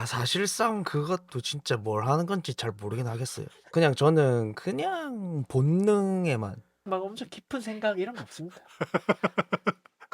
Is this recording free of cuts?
no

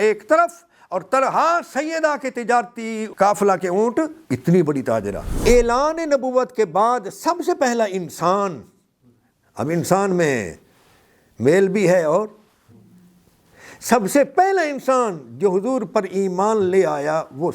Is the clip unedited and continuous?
no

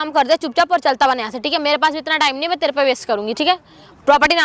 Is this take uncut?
yes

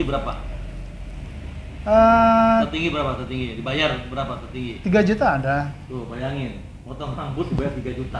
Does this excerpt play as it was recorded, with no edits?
yes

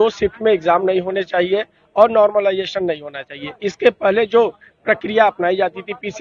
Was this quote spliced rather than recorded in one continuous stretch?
no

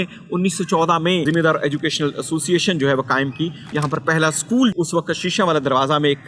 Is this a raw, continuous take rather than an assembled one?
no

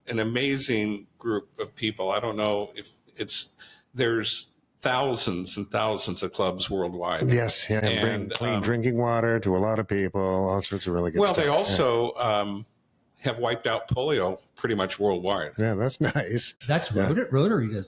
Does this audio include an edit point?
yes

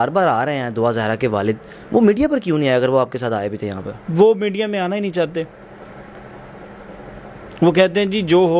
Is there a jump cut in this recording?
no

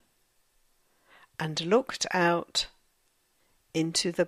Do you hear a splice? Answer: no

